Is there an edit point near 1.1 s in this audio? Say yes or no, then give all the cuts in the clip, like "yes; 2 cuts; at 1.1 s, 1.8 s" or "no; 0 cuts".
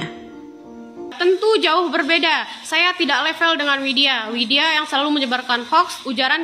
yes; 1 cut; at 1.1 s